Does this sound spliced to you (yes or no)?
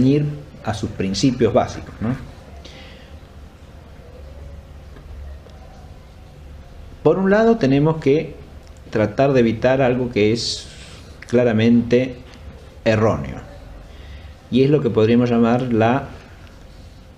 no